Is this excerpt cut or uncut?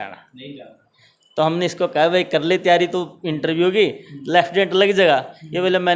uncut